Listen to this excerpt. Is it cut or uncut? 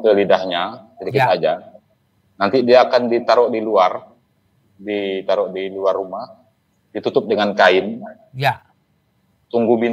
uncut